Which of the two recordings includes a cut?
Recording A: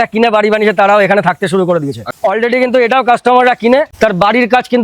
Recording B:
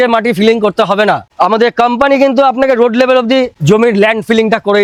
A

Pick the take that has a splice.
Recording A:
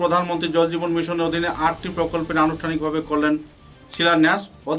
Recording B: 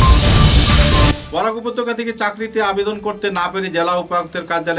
B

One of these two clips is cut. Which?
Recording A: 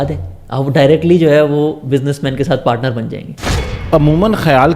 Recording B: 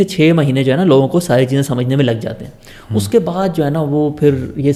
A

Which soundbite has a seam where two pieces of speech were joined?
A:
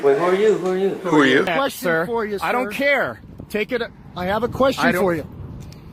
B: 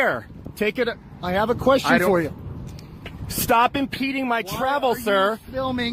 A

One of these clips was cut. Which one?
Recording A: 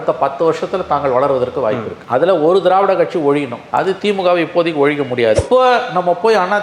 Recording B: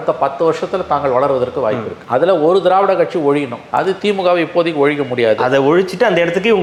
A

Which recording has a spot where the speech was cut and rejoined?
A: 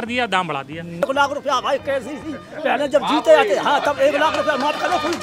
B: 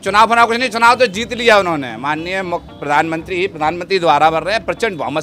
A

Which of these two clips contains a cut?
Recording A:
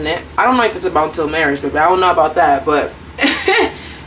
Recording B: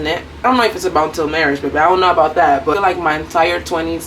B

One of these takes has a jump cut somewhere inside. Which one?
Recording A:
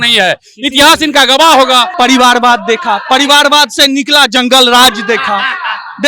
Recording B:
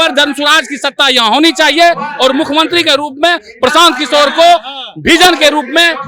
A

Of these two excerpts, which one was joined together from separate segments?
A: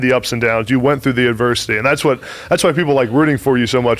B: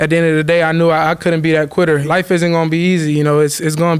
B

